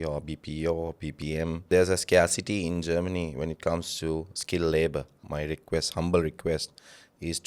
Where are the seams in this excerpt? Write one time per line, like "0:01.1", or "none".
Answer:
0:01.7
0:05.2